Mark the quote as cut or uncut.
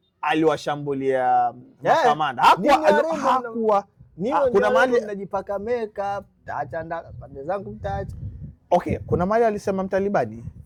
uncut